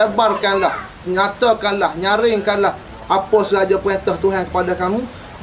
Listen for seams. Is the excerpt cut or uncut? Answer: uncut